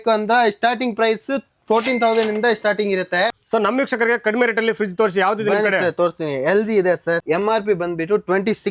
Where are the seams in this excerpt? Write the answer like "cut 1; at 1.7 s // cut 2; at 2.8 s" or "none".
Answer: cut 1; at 3.4 s // cut 2; at 7.2 s